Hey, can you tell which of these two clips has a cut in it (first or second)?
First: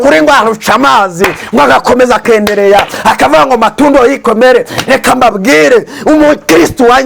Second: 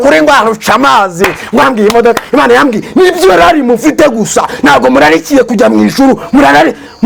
second